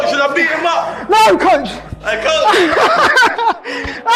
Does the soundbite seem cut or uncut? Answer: uncut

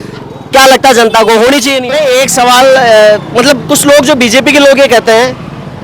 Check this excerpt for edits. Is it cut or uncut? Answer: cut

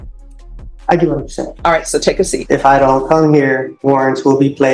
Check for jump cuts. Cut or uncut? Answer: cut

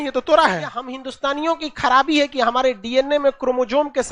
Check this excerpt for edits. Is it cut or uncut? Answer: cut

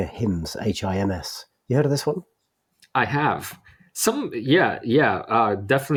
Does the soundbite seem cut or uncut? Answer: uncut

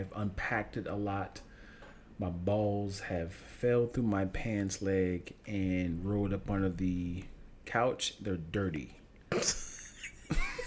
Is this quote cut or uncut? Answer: uncut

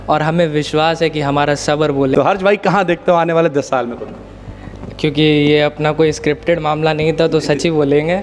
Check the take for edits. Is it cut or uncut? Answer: cut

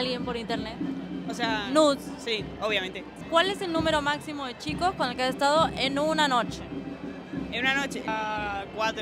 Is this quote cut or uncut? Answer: cut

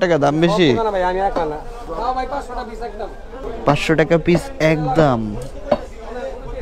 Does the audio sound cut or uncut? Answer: cut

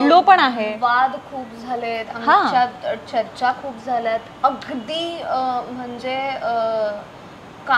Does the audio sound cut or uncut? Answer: uncut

